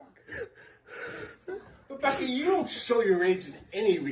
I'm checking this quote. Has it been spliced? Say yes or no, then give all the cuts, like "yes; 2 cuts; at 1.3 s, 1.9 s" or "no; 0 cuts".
no; 0 cuts